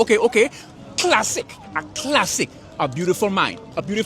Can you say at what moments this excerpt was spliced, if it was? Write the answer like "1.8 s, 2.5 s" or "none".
2.4 s